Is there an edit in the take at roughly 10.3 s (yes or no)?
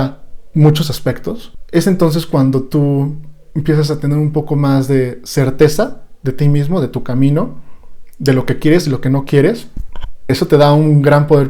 yes